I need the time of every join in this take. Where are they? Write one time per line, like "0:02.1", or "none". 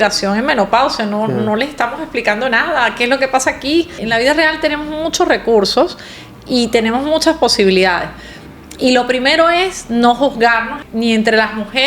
0:04.0
0:10.8